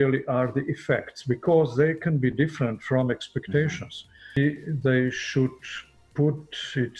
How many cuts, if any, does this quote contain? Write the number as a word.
one